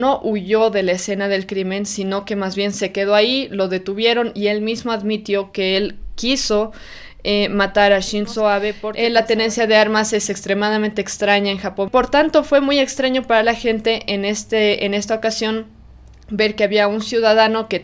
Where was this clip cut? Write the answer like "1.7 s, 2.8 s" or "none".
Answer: 8.8 s, 11.9 s